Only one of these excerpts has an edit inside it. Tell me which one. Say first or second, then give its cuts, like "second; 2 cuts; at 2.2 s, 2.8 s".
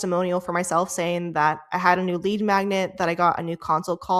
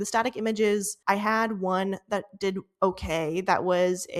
second; 1 cut; at 0.9 s